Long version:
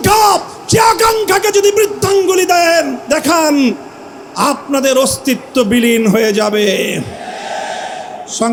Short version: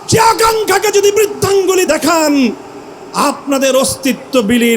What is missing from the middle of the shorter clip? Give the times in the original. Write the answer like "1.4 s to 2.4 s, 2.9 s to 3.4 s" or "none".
2.5 s to 3.1 s

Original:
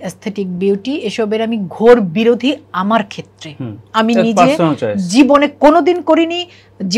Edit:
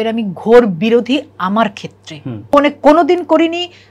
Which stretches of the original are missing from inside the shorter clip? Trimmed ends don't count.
3.8 s to 5.3 s

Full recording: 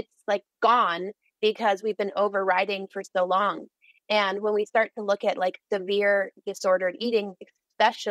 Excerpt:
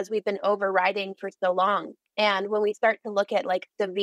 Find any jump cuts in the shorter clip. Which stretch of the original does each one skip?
3.7 s to 3.9 s

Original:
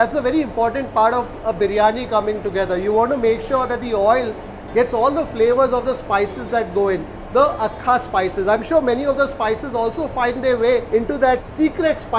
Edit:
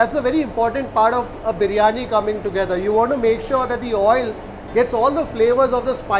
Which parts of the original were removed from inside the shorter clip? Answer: none

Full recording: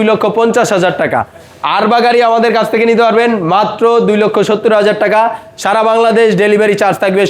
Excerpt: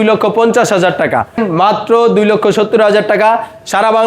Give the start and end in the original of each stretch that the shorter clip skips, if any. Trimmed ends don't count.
1.4 s to 3.3 s

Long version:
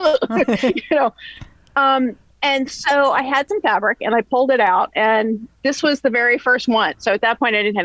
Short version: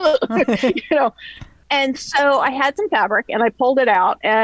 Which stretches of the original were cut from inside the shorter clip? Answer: 1.5 s to 2.3 s

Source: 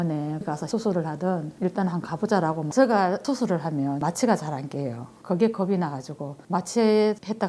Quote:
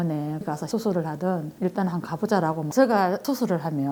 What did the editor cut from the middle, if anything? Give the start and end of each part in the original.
none

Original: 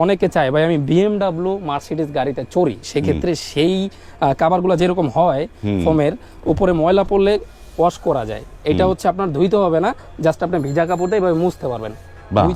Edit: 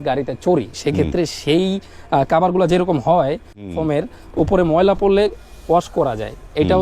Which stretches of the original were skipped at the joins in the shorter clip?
none

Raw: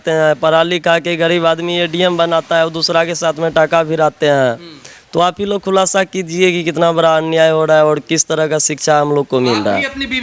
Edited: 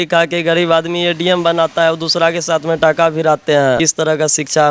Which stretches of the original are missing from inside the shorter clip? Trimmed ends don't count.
4.5 s to 8.1 s

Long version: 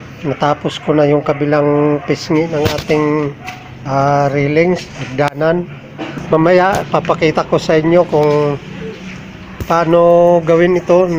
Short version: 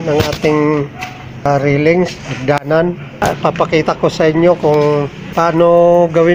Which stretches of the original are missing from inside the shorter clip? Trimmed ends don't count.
3.9 s to 4.1 s, 5.9 s to 6.7 s, 8.7 s to 9.5 s

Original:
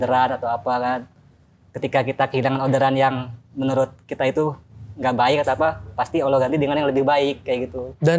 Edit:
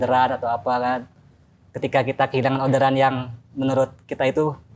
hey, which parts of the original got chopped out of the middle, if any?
none

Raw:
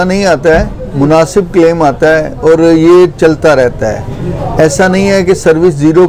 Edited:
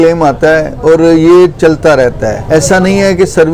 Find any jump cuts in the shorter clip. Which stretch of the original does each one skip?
4.0 s to 4.5 s

